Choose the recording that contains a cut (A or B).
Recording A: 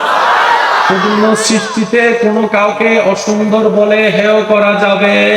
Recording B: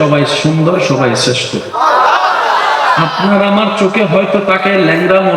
B